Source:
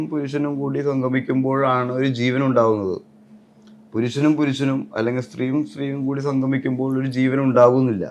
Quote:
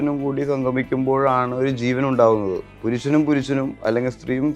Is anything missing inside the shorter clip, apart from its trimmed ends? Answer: yes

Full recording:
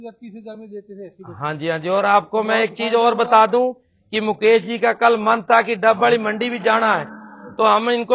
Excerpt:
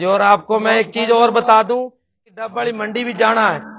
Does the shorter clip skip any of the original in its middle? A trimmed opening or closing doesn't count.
yes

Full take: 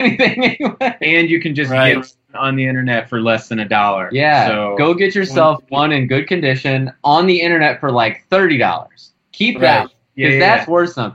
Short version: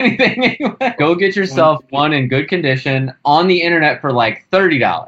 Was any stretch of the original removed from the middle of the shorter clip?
yes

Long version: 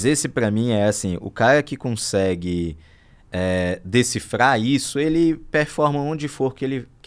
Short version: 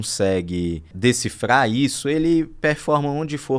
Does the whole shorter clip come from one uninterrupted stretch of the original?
no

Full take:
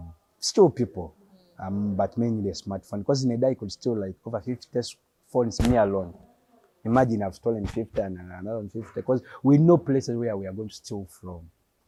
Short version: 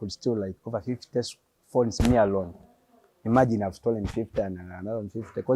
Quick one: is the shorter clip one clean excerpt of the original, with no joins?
yes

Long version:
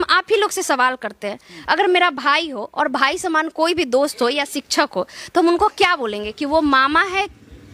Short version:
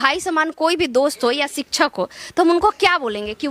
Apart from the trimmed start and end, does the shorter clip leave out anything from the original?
no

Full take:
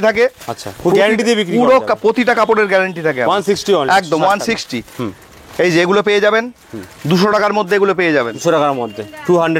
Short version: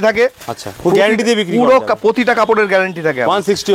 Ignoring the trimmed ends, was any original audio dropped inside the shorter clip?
no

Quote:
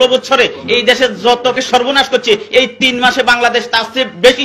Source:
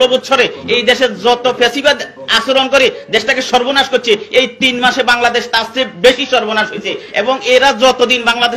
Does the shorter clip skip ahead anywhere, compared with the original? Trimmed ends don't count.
yes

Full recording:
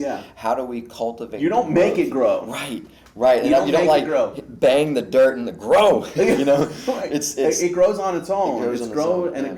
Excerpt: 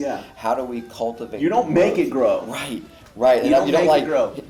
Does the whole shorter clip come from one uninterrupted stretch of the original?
yes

